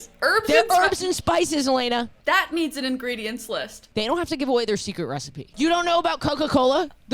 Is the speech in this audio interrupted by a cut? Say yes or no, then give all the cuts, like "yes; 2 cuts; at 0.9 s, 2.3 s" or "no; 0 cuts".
yes; 3 cuts; at 2.1 s, 3.8 s, 5.4 s